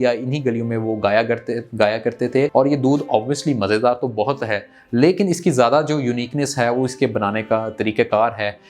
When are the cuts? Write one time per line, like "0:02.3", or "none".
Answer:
0:02.5